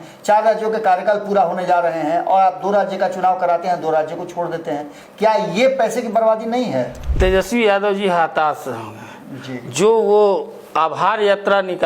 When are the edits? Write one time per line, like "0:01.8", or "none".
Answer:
0:07.0